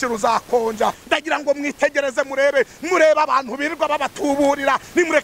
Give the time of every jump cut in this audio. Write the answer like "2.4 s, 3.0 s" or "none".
1.0 s